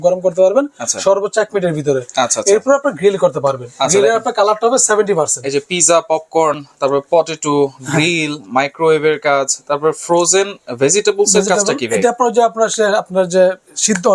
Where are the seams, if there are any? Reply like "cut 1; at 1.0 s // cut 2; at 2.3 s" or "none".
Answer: none